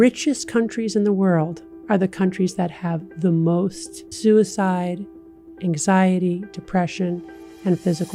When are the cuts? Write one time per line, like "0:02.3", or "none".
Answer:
none